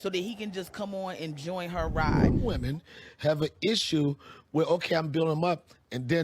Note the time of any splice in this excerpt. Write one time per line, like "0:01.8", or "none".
0:01.9